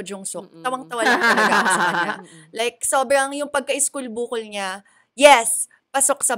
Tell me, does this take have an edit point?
no; 0 cuts

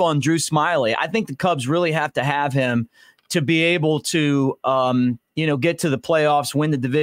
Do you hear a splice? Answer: no; 0 cuts

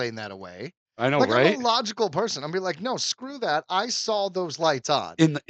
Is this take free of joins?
yes; 0 cuts

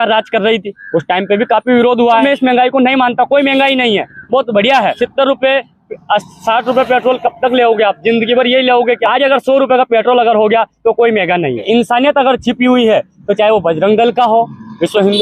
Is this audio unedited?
no; 4 cuts; at 2.2 s, 4.9 s, 9.0 s, 11.6 s

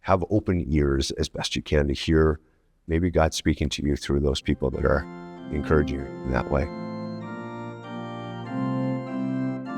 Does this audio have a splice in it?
yes; 1 cut; at 7.3 s

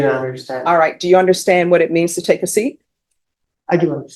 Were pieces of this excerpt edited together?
no; 0 cuts

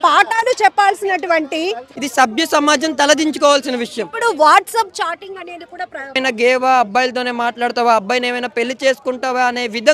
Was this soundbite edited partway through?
yes; 2 cuts; at 1.9 s, 6.2 s

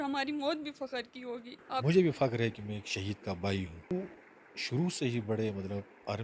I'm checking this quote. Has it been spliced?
yes; 2 cuts; at 1.8 s, 3.9 s

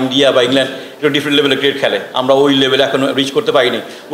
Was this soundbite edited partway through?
no; 0 cuts

